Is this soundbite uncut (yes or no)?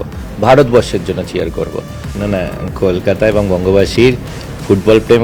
no